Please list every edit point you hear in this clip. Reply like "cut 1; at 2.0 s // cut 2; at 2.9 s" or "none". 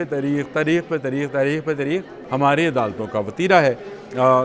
cut 1; at 2.2 s